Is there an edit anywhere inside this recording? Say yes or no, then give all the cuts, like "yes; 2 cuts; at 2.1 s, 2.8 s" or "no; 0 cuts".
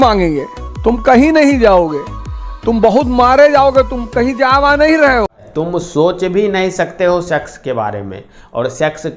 yes; 1 cut; at 5.4 s